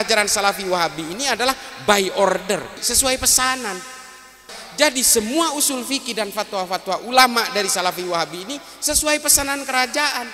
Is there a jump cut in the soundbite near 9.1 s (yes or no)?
no